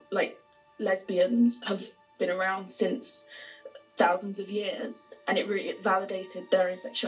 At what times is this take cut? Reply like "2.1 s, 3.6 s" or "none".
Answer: none